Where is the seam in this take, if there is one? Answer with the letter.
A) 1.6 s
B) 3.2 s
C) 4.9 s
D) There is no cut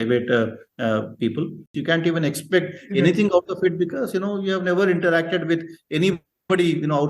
A